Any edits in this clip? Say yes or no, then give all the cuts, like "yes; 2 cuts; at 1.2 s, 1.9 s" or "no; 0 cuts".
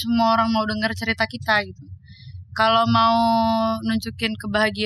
no; 0 cuts